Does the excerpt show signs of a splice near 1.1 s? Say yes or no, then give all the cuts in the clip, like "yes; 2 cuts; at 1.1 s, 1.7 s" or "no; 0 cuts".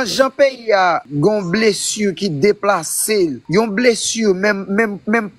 yes; 2 cuts; at 1.1 s, 3.4 s